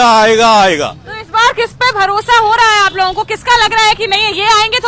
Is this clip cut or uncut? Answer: uncut